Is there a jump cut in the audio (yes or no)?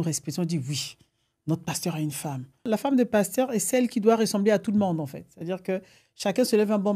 yes